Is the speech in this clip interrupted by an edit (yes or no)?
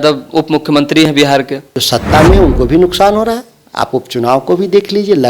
yes